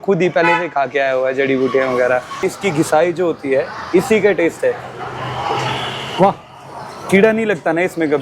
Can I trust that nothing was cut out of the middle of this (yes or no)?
no